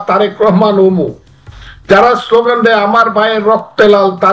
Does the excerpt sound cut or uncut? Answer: uncut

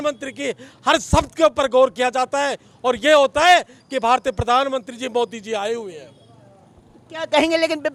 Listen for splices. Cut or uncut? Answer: uncut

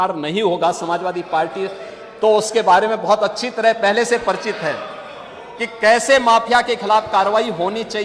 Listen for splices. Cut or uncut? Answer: uncut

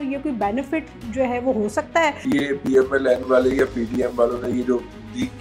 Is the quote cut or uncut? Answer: cut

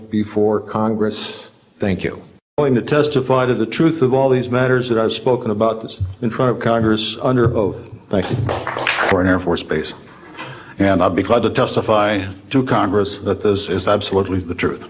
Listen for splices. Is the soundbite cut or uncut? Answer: cut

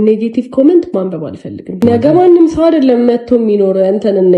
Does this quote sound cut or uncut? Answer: cut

